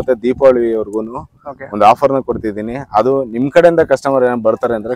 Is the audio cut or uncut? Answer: uncut